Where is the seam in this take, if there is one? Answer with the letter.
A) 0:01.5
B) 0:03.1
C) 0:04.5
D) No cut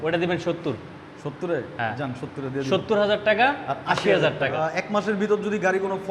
C